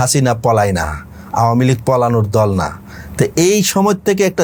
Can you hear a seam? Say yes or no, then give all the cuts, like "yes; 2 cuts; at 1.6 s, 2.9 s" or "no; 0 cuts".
no; 0 cuts